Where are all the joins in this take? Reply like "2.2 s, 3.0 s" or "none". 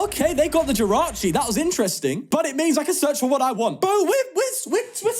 2.3 s, 3.8 s